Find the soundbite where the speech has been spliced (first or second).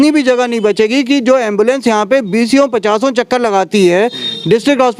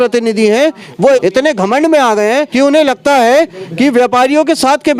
second